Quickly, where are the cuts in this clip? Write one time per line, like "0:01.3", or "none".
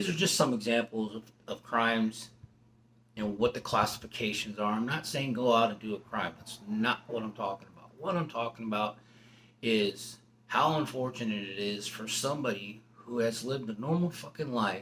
none